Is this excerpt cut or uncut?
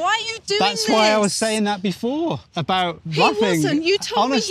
cut